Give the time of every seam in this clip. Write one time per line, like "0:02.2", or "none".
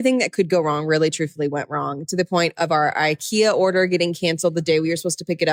none